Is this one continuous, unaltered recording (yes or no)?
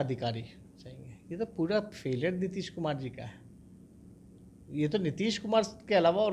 yes